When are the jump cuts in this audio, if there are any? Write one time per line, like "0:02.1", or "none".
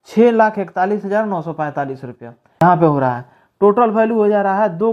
0:02.6